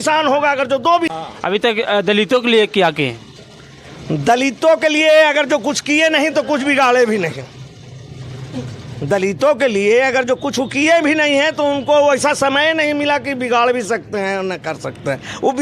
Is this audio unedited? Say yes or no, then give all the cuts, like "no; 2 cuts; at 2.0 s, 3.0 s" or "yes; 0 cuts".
no; 1 cut; at 1.1 s